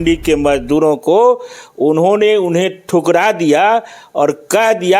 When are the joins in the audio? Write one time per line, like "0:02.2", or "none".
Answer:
0:01.5

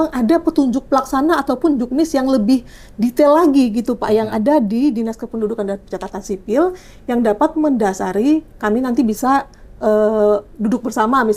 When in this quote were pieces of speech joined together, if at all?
none

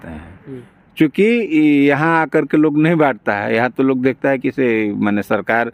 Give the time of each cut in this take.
none

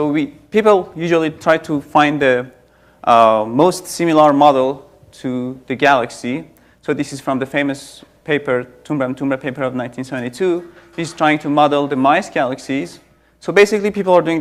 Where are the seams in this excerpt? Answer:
none

